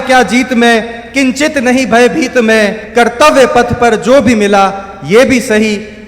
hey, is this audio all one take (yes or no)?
no